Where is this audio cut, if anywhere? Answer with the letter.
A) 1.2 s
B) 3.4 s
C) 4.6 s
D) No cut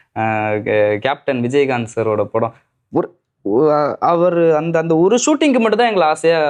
D